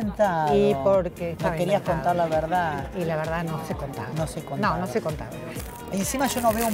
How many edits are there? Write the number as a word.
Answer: one